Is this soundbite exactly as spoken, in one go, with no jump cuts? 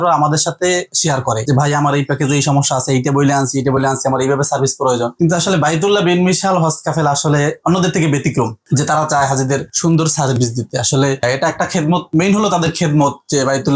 yes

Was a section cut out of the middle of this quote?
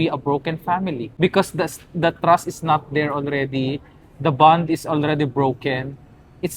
yes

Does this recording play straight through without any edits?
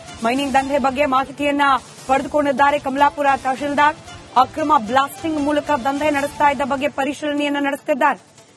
yes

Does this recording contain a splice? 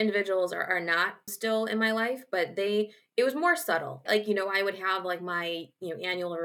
yes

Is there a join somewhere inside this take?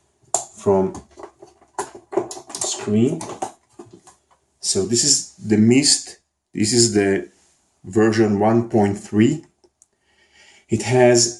no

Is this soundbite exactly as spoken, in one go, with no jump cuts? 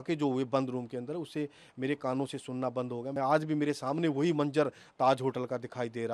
no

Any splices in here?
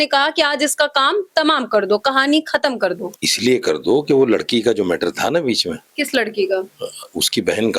no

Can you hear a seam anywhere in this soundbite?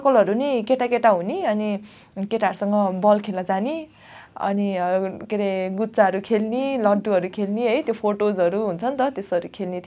no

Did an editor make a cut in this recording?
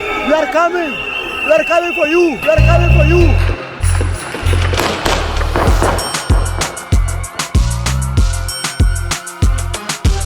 no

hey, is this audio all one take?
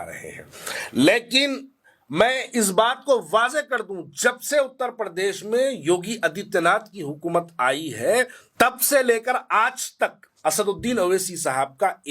no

